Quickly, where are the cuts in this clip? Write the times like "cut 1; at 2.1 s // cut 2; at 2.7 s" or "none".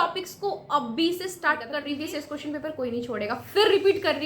cut 1; at 1.8 s